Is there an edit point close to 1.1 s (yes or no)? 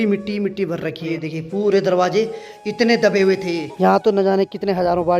yes